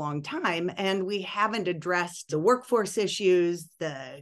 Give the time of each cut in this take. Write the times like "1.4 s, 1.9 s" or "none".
2.2 s